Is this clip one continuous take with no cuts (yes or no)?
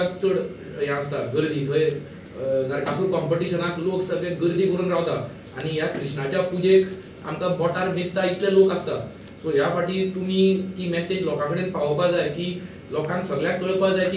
yes